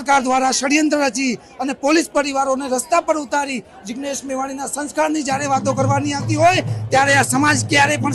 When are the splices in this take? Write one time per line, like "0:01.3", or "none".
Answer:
none